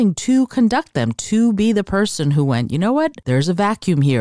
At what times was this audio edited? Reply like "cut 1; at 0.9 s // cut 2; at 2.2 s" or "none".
cut 1; at 3.2 s

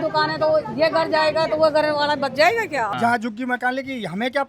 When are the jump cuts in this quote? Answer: cut 1; at 3.0 s

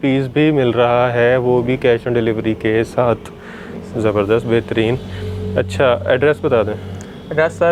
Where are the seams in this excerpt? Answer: none

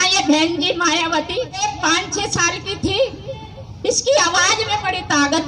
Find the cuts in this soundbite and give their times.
cut 1; at 1.6 s

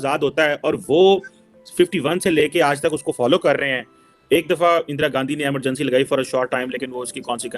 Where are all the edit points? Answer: none

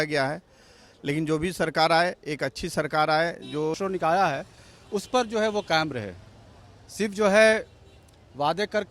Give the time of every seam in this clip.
cut 1; at 3.8 s

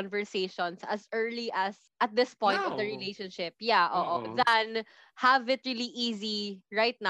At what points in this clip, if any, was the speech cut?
cut 1; at 1.8 s

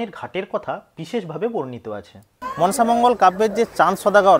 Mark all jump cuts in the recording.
cut 1; at 2.4 s

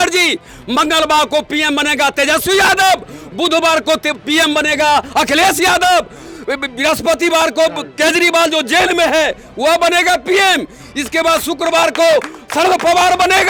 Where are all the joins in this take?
none

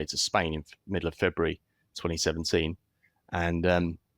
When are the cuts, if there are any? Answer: none

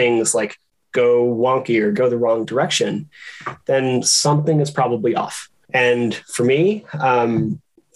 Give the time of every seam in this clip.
cut 1; at 5.6 s

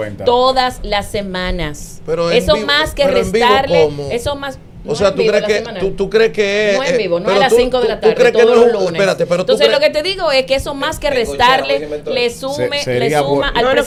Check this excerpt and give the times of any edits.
none

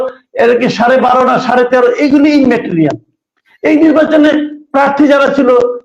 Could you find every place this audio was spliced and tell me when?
none

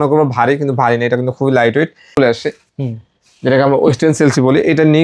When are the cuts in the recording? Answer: cut 1; at 2.2 s

